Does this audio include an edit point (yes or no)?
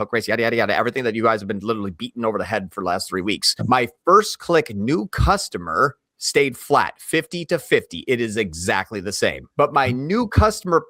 yes